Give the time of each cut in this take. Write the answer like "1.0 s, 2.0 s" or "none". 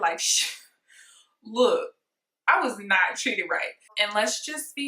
4.0 s